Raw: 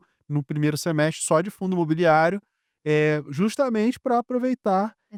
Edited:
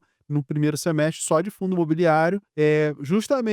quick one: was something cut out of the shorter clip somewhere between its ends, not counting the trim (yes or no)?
yes